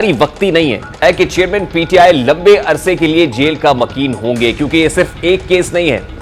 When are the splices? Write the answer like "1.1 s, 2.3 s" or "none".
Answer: 1.0 s